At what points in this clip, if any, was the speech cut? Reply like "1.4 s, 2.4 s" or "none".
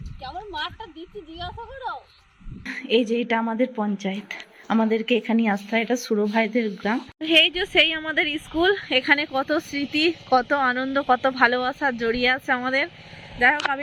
2.7 s, 7.1 s